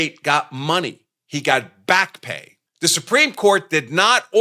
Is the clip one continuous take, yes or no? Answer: yes